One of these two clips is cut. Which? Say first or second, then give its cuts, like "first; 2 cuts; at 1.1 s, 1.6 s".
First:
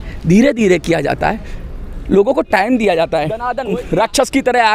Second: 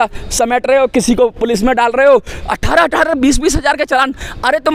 first; 1 cut; at 3.5 s